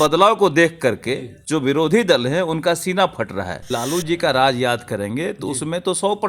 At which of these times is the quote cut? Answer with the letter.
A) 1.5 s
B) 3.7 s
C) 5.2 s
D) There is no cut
B